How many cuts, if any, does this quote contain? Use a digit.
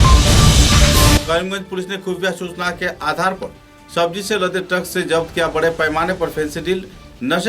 1